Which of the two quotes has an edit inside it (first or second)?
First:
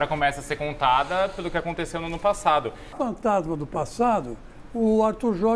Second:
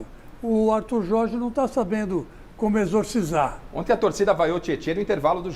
first